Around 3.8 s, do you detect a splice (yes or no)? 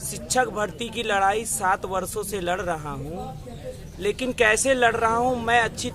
no